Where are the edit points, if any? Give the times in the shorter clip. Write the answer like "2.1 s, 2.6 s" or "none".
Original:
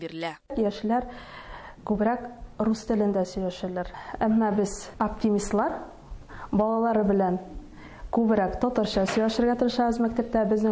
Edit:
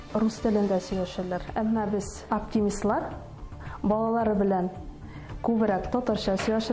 1.7 s